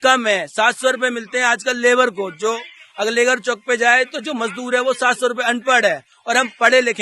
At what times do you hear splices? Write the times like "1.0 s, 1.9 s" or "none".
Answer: none